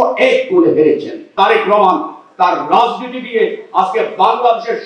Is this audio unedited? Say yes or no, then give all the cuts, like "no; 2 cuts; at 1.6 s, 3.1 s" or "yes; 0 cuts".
no; 1 cut; at 1.3 s